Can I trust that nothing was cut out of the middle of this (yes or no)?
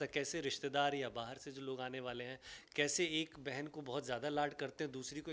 yes